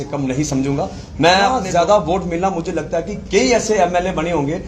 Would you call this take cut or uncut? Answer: cut